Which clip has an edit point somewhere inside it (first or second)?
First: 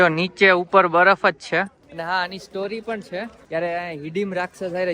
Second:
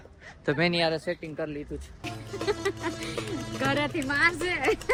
first